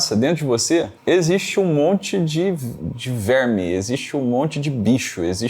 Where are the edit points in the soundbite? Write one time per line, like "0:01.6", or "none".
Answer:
0:00.9